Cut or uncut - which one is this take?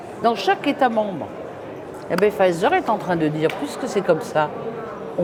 uncut